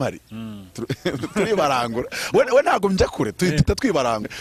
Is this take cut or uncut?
uncut